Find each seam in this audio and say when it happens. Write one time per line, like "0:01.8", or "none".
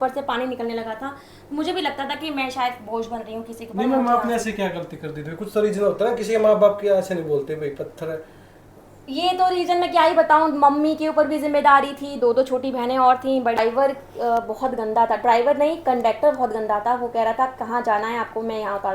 0:13.6